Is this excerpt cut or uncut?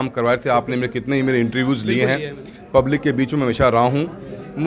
uncut